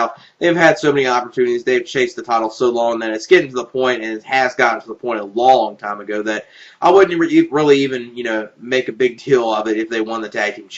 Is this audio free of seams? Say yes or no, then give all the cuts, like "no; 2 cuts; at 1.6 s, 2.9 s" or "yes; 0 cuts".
yes; 0 cuts